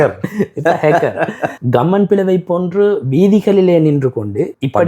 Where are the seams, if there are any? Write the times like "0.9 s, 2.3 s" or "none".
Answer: 1.5 s